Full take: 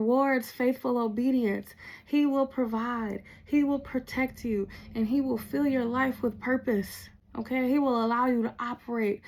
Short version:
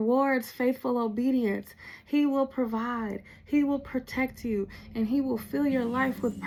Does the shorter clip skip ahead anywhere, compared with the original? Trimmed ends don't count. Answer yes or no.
no